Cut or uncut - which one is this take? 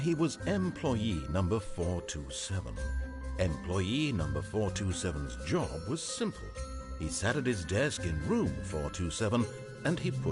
cut